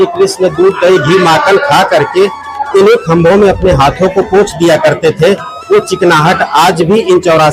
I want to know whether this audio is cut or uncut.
uncut